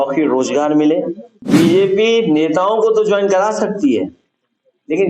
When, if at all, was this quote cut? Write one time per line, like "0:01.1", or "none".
0:01.3